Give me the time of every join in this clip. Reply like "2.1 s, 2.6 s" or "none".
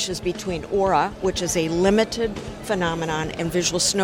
none